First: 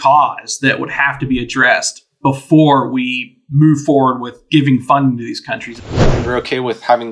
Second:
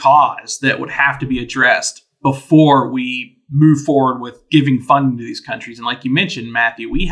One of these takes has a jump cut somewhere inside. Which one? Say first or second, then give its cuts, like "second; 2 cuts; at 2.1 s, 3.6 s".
first; 1 cut; at 6.0 s